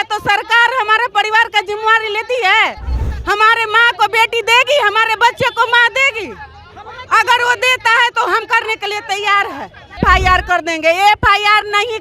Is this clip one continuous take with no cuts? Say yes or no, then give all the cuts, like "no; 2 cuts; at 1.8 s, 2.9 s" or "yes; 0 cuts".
no; 1 cut; at 10.0 s